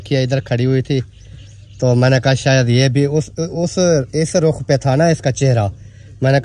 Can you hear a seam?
no; 0 cuts

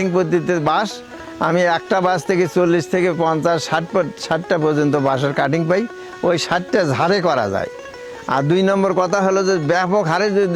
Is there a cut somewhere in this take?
no; 0 cuts

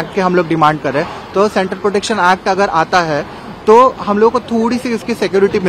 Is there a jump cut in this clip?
no; 0 cuts

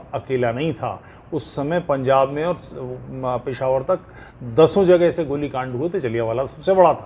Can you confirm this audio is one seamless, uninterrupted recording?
yes; 0 cuts

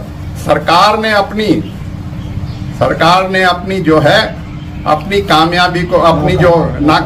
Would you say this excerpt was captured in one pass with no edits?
yes; 0 cuts

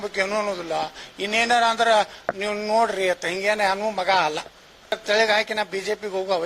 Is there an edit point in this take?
yes; 1 cut; at 4.9 s

